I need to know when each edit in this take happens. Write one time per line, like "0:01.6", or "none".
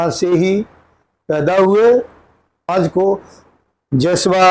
0:02.7